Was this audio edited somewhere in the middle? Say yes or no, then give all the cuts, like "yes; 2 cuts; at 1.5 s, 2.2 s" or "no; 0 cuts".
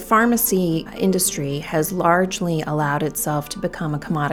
yes; 1 cut; at 0.9 s